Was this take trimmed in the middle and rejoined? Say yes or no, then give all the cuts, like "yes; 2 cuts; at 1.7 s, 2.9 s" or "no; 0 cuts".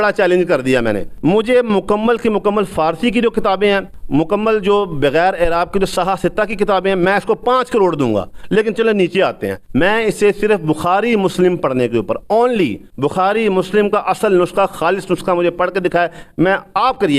yes; 4 cuts; at 1.1 s, 3.9 s, 9.5 s, 12.8 s